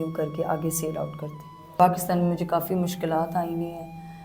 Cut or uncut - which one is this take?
cut